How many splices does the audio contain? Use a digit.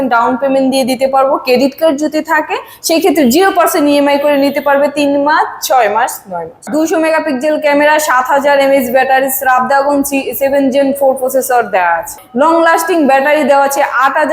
2